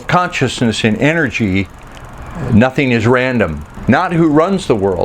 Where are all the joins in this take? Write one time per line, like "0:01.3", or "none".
0:03.7